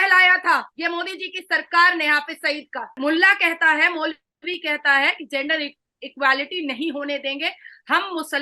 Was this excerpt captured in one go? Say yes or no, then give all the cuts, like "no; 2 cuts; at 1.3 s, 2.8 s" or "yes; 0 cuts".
no; 1 cut; at 2.9 s